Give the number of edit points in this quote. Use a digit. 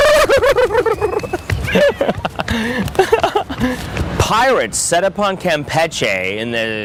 0